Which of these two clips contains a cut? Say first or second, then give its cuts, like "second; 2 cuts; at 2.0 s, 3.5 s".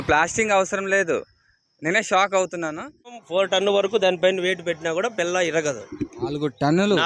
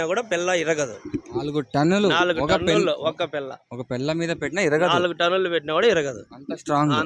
first; 1 cut; at 3.2 s